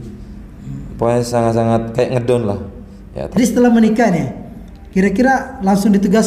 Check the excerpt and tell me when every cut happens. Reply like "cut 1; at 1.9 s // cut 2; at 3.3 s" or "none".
cut 1; at 3.4 s